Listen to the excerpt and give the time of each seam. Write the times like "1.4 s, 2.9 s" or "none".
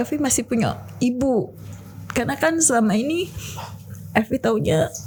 none